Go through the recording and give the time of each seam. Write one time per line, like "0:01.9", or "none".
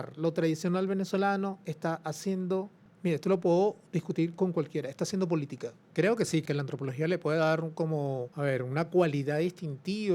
0:02.8
0:05.8
0:06.4
0:08.3